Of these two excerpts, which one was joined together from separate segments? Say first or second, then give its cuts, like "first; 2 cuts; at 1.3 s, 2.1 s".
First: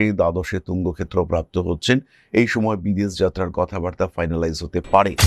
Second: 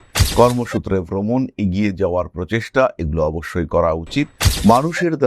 second; 1 cut; at 4.4 s